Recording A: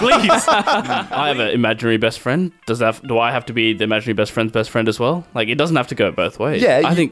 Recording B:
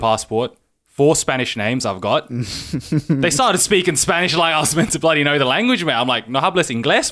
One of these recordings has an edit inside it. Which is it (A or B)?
A